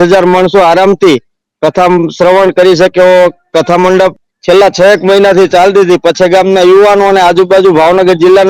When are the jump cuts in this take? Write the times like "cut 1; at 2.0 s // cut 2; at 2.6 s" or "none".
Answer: cut 1; at 4.2 s